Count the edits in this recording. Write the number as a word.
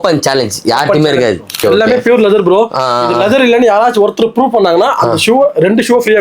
one